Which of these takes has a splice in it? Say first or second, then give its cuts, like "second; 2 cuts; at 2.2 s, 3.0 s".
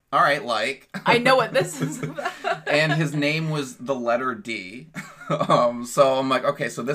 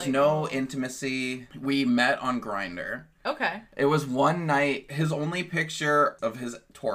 second; 4 cuts; at 1.4 s, 3.6 s, 4.9 s, 6.2 s